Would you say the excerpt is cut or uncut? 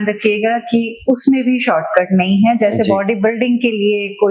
uncut